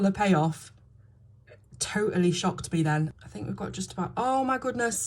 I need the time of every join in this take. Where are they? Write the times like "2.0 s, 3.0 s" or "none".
3.1 s